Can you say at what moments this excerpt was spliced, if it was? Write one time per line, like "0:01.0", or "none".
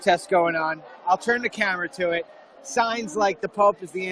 0:02.5